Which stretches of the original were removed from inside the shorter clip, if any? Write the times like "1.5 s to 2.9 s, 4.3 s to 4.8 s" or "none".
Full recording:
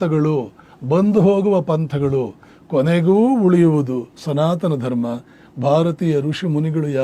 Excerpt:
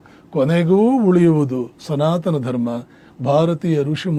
none